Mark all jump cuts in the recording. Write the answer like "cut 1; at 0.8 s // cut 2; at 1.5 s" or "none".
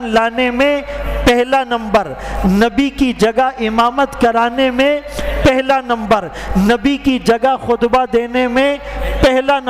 none